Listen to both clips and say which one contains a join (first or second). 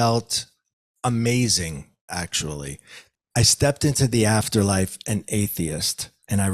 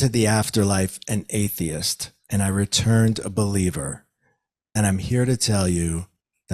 first